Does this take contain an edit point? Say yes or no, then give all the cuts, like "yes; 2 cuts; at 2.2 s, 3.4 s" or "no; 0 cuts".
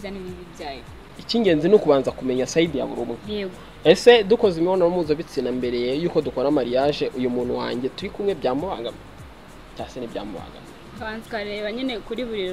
yes; 1 cut; at 1.2 s